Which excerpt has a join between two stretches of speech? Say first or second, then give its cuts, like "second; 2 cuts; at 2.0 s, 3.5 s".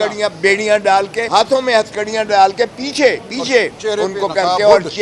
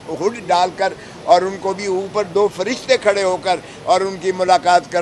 first; 1 cut; at 1.2 s